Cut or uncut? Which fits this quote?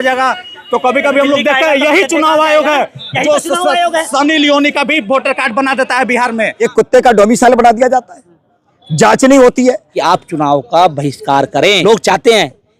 cut